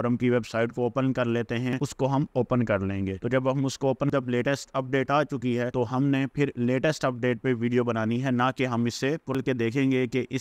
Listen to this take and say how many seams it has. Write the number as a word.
three